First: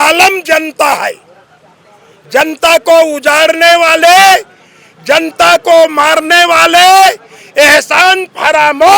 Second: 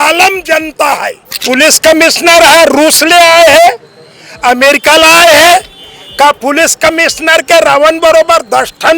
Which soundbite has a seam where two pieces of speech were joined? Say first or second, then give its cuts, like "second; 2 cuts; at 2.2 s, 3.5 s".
second; 1 cut; at 1.4 s